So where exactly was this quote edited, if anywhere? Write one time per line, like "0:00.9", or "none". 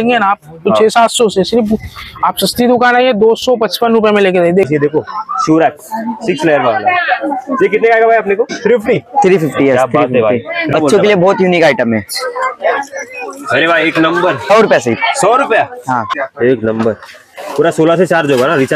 0:04.6
0:08.5
0:10.7
0:14.5
0:16.2